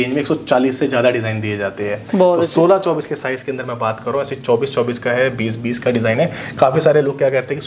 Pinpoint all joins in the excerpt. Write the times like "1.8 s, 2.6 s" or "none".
none